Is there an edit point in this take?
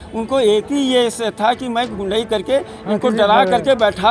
no; 0 cuts

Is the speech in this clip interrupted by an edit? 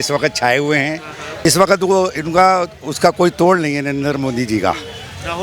yes; 1 cut; at 1.5 s

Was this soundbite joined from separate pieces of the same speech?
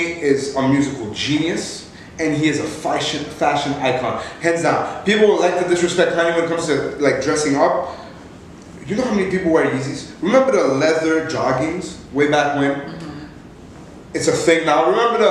no; 0 cuts

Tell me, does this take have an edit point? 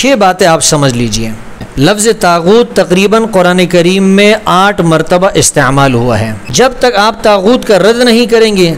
yes; 2 cuts; at 1.6 s, 6.4 s

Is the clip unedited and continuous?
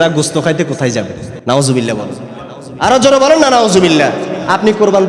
no; 1 cut; at 1.2 s

